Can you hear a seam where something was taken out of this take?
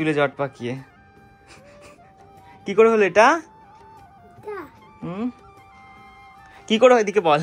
no; 0 cuts

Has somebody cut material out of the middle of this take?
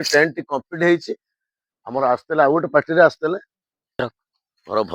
yes; 1 cut; at 4.0 s

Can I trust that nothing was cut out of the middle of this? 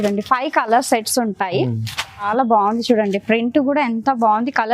no; 1 cut; at 2.3 s

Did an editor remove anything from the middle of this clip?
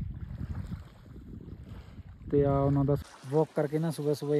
yes; 1 cut; at 3.0 s

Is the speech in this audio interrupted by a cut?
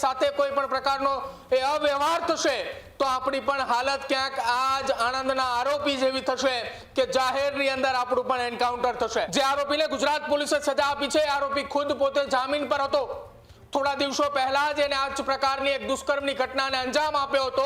yes; 1 cut; at 9.3 s

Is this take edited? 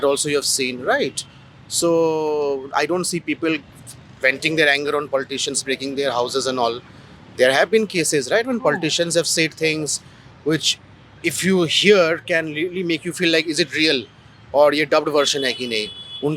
no; 0 cuts

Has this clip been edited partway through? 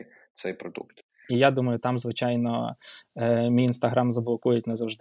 yes; 1 cut; at 1.2 s

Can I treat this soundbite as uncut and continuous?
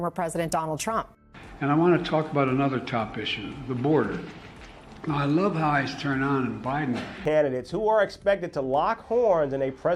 no; 2 cuts; at 1.2 s, 7.2 s

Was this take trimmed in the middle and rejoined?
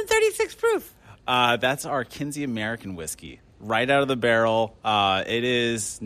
no; 0 cuts

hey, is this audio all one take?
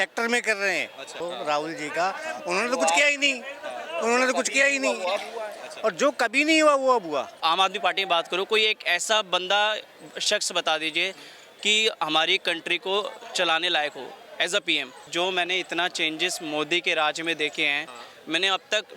no; 3 cuts; at 1.2 s, 7.4 s, 15.0 s

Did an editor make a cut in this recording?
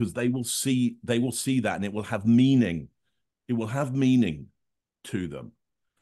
no; 0 cuts

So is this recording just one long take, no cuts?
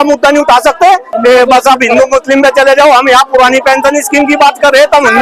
no; 1 cut; at 1.1 s

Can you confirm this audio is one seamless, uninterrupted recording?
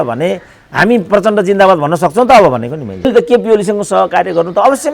no; 1 cut; at 3.1 s

